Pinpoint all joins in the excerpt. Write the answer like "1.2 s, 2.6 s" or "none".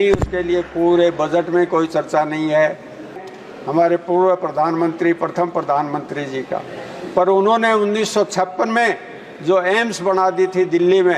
3.2 s